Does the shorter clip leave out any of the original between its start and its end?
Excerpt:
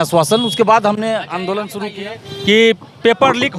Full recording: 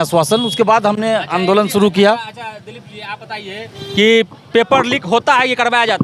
yes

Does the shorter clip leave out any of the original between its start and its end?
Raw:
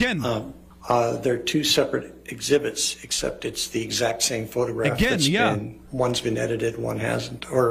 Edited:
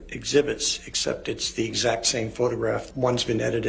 yes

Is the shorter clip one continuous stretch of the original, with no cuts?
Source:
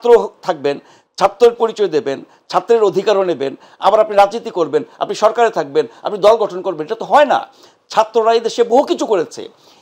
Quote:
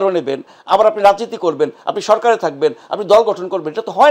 yes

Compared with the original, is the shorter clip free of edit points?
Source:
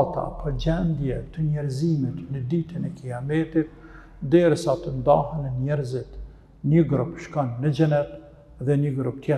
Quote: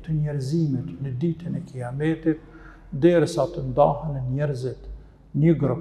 yes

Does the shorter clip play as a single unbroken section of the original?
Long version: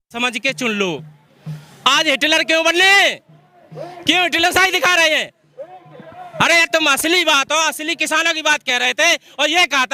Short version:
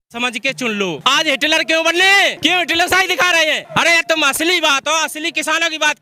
no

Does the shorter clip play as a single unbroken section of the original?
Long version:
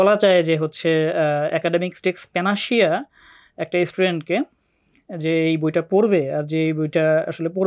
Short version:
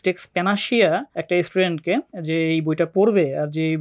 no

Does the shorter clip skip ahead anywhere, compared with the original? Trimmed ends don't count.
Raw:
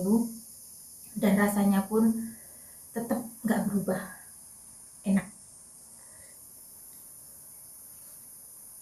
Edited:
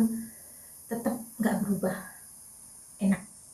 no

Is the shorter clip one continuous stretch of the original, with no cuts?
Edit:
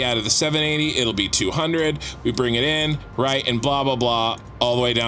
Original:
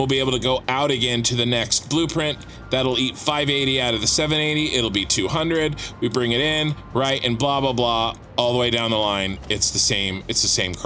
yes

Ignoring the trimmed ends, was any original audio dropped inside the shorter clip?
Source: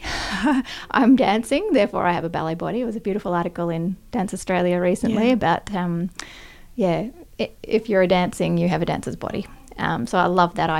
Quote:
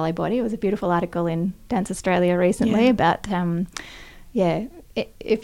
no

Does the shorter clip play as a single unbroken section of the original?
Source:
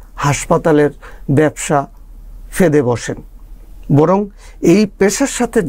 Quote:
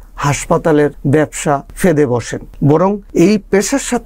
no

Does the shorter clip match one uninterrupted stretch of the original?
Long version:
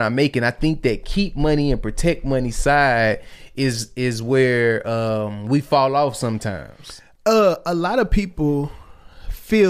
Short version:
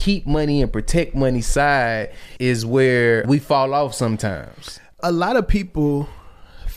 no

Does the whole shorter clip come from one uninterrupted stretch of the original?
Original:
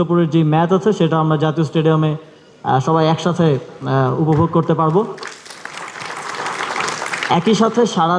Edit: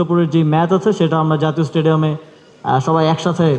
yes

